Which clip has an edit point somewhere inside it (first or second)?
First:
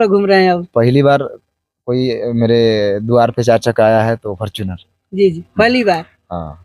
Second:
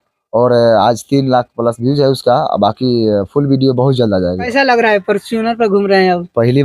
second